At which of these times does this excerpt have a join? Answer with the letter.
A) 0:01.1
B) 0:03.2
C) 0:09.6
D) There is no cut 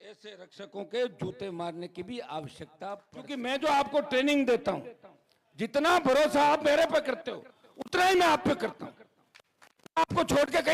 B